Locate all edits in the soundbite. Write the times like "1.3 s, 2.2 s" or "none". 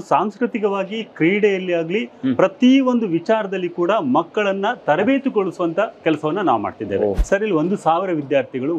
7.2 s